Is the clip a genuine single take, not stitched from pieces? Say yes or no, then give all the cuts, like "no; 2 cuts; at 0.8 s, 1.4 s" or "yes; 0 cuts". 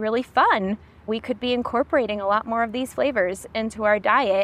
yes; 0 cuts